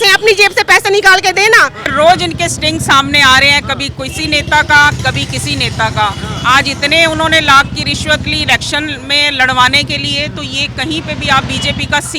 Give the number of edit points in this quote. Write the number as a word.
one